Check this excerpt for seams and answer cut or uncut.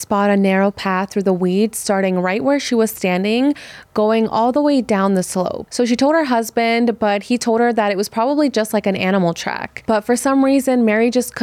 cut